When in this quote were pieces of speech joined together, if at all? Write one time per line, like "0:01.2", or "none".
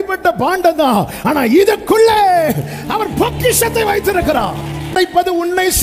0:04.9